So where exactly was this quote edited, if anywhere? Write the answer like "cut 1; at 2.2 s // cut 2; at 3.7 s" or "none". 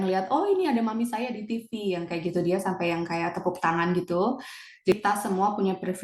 cut 1; at 4.9 s

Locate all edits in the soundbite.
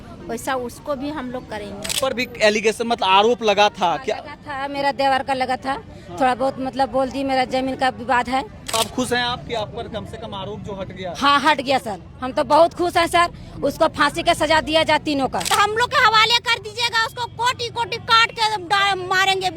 cut 1; at 1.9 s // cut 2; at 8.7 s // cut 3; at 15.4 s

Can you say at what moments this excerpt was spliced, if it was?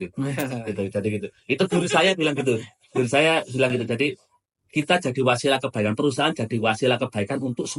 none

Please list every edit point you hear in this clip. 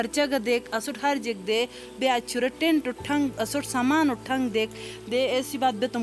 none

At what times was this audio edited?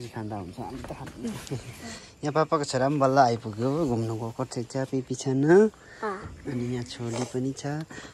cut 1; at 1.1 s

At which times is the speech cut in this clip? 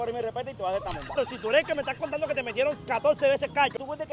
cut 1; at 1.2 s

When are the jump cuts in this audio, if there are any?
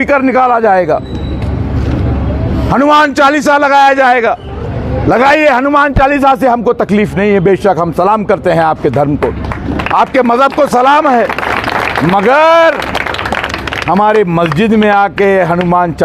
none

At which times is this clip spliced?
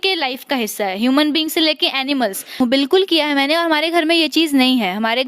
cut 1; at 2.6 s

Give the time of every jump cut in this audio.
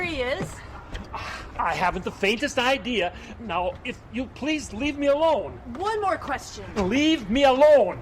cut 1; at 6.5 s

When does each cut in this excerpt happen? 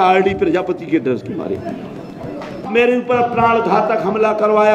cut 1; at 2.7 s

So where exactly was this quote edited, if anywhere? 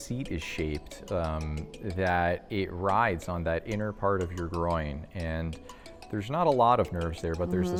none

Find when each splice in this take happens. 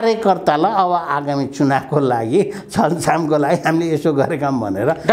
none

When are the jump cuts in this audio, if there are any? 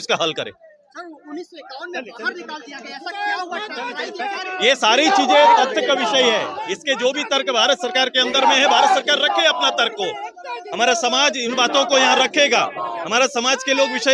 none

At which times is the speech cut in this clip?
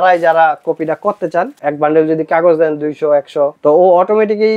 cut 1; at 1.6 s // cut 2; at 3.6 s

